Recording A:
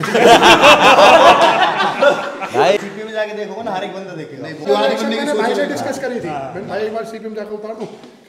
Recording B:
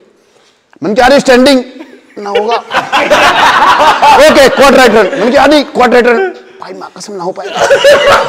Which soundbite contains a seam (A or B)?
A